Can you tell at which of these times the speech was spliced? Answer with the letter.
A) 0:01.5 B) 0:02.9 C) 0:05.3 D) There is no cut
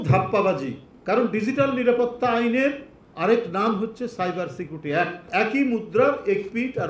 C